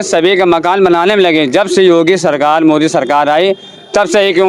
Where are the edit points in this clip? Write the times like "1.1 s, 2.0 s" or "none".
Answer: none